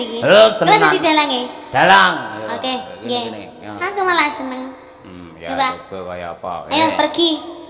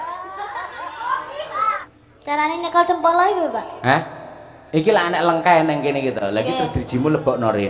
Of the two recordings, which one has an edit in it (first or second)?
second